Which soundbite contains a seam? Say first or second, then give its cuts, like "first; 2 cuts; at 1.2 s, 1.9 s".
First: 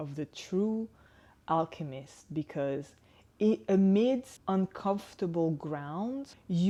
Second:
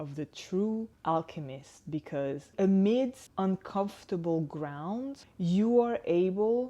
second; 2 cuts; at 0.9 s, 2.5 s